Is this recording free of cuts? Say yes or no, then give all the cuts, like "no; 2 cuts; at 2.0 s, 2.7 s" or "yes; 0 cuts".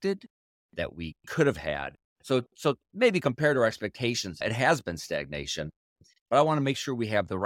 no; 2 cuts; at 4.4 s, 6.1 s